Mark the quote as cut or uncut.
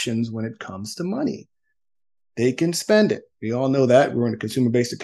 uncut